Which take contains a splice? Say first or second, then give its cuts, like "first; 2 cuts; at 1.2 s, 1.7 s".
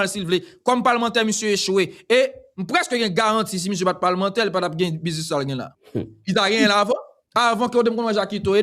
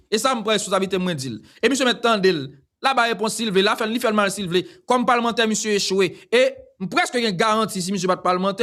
first; 2 cuts; at 5.8 s, 7.2 s